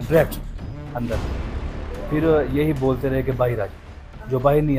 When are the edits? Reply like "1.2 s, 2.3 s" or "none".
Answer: none